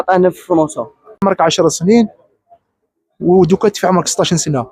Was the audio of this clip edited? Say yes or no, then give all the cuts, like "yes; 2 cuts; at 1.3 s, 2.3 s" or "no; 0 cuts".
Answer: yes; 1 cut; at 1.2 s